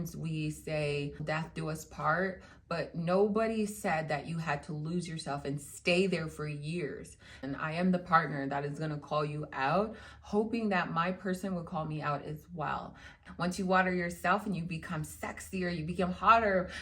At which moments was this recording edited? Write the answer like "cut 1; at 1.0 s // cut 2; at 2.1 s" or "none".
cut 1; at 1.2 s // cut 2; at 13.2 s